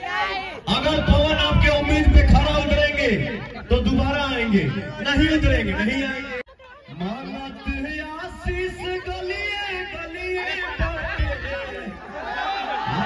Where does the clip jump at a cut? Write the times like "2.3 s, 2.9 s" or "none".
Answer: 6.4 s